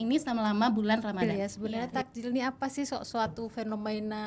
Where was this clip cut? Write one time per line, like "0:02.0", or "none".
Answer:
0:01.2